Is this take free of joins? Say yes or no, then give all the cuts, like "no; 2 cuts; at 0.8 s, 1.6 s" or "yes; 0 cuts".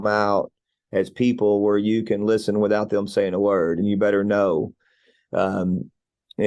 yes; 0 cuts